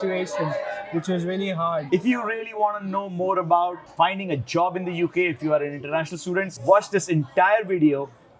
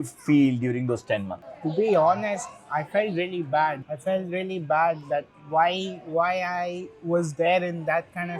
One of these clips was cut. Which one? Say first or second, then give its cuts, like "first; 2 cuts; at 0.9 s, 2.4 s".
first; 3 cuts; at 1.9 s, 3.8 s, 6.5 s